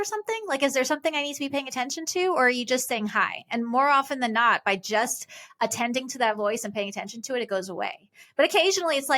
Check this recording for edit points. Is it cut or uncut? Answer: uncut